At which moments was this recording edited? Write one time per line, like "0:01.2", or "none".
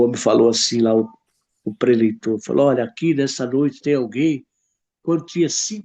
none